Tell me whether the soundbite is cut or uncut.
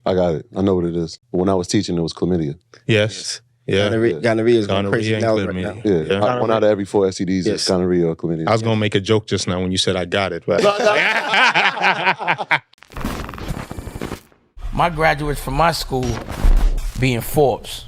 cut